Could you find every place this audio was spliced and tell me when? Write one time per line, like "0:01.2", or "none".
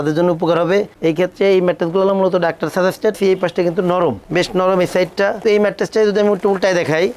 0:03.2
0:05.4

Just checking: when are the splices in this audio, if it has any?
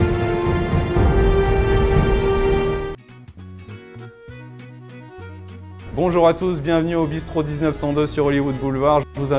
0:03.0

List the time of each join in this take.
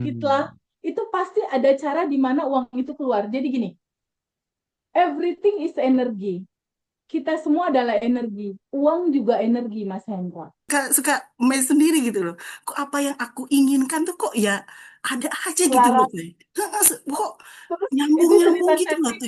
0:10.6

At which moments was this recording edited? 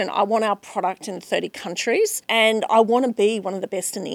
0:02.2

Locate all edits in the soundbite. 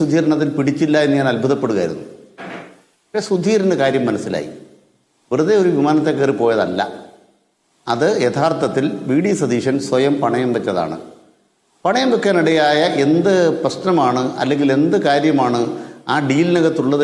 none

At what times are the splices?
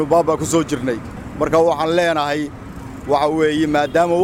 none

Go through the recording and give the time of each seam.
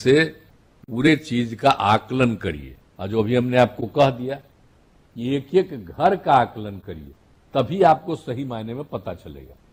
none

